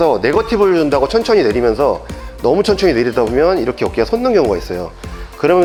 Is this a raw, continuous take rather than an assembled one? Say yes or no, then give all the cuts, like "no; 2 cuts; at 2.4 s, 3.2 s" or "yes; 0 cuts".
yes; 0 cuts